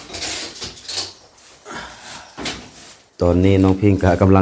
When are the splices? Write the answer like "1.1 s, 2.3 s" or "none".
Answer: 3.2 s